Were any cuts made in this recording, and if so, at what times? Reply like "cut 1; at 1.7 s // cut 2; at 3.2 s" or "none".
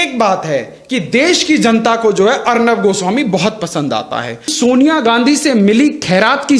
cut 1; at 4.5 s